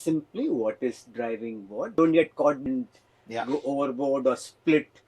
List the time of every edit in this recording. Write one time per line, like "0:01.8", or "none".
0:02.0
0:02.6